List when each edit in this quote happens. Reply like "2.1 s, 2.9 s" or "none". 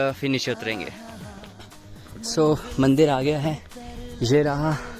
none

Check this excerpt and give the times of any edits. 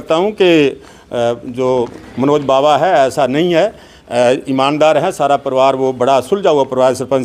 none

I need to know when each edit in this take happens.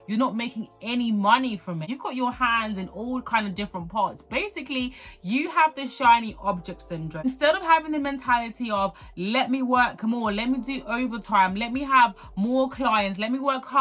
1.9 s, 7.2 s

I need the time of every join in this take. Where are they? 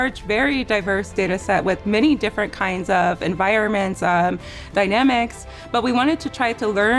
none

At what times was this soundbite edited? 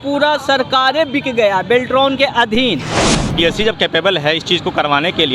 3.3 s

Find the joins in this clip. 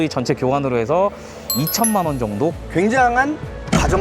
2.6 s

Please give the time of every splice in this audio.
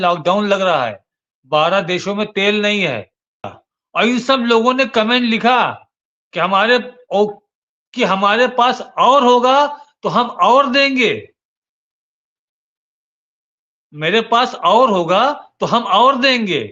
3.5 s

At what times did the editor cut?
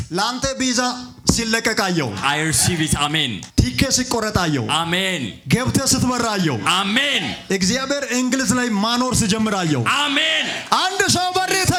none

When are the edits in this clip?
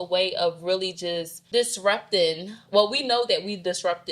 1.4 s

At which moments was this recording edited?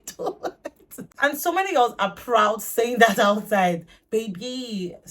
1.2 s

